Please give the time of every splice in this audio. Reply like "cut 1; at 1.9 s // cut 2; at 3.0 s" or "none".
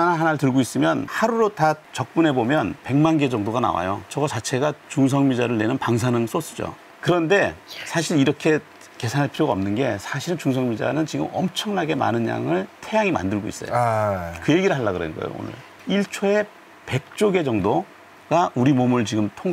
cut 1; at 6.7 s // cut 2; at 15.7 s